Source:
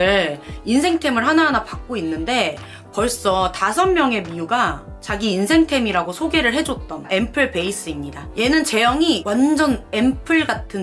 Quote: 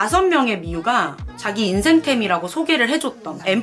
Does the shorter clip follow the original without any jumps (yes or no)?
yes